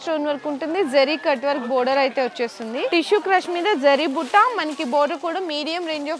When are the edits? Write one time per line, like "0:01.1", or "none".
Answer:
0:02.9